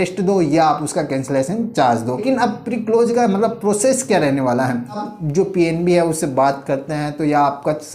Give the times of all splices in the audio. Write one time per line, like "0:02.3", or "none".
0:02.2
0:05.0